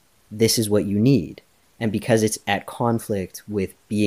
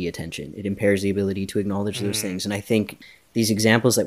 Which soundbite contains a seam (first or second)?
second